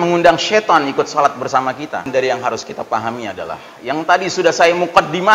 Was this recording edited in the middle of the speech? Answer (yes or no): yes